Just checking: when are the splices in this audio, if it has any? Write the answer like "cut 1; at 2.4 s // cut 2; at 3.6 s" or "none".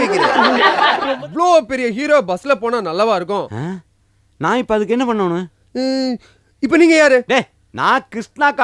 cut 1; at 1.1 s